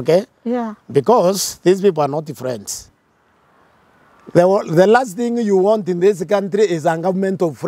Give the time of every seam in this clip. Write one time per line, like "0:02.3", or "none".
none